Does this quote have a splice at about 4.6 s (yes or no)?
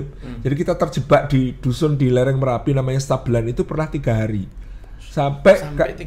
no